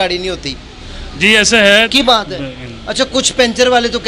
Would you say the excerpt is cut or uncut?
cut